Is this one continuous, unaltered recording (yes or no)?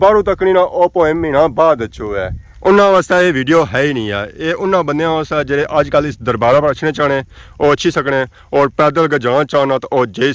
yes